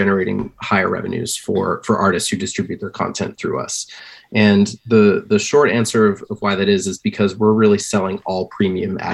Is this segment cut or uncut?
uncut